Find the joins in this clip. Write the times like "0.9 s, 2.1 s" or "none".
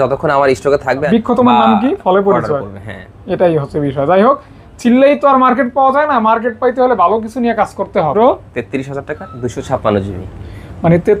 1.0 s, 8.1 s